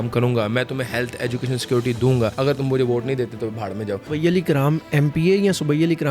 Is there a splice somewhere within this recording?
yes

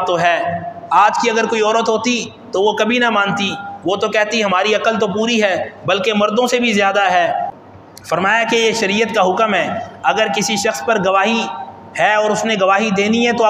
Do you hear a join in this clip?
yes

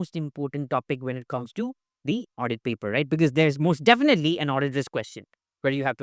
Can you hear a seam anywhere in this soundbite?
no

